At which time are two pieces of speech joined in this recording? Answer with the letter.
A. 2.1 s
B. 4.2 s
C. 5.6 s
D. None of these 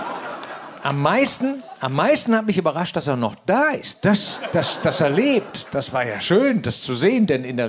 C